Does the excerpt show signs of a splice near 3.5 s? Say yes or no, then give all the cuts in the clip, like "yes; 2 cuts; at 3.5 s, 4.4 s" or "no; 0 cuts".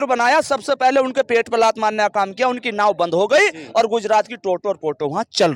no; 0 cuts